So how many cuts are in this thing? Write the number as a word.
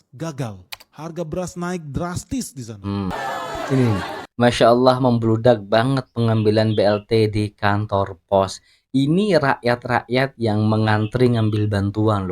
one